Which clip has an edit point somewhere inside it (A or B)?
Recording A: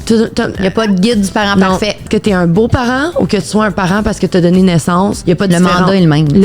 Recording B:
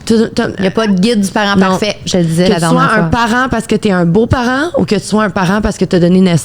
A